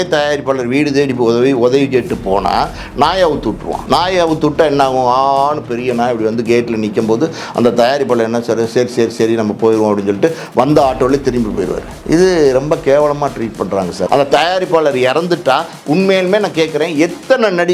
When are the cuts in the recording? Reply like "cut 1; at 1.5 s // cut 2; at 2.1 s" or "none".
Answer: cut 1; at 3.7 s // cut 2; at 14.0 s